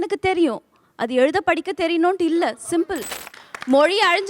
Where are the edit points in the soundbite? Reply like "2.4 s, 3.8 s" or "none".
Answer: 3.1 s